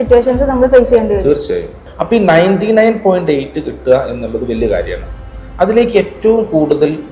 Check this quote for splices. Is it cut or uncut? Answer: cut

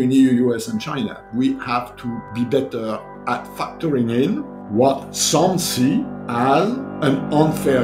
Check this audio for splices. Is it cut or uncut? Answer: cut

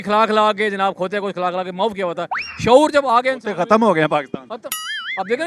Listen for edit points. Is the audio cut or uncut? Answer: uncut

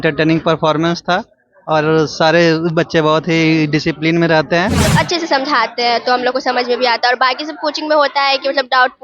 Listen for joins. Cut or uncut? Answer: cut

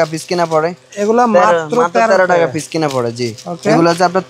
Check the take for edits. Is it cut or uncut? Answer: uncut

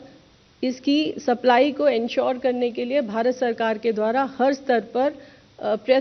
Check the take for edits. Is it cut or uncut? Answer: uncut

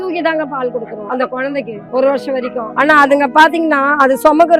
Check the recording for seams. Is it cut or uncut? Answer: cut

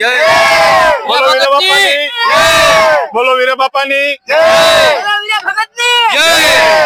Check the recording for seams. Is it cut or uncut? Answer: uncut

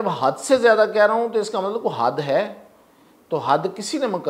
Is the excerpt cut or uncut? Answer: uncut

